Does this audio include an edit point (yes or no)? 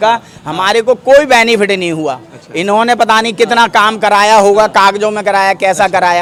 no